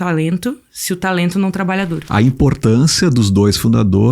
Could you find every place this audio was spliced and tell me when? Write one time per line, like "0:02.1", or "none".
0:02.0